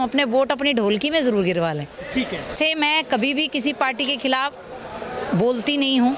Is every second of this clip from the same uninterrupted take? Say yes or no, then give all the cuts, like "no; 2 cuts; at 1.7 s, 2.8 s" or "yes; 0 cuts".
no; 1 cut; at 2.5 s